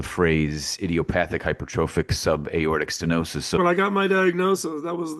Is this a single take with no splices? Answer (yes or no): no